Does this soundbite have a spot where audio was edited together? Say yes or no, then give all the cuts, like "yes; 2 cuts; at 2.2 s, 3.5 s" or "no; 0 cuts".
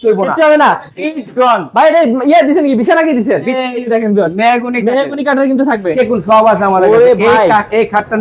yes; 2 cuts; at 3.5 s, 5.9 s